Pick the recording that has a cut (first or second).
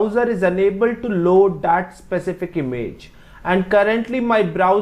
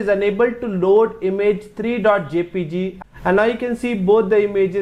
second